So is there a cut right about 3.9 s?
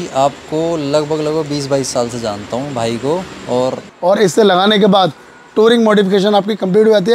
yes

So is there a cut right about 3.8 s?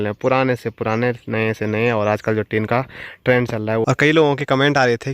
yes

